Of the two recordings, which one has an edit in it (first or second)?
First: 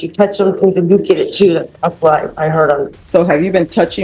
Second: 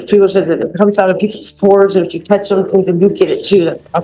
first